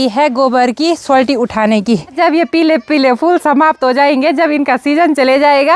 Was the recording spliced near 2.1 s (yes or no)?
yes